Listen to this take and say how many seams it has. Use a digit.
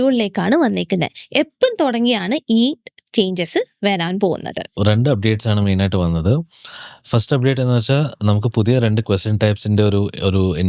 1